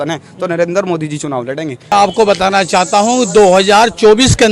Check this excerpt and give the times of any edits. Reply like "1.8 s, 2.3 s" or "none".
1.9 s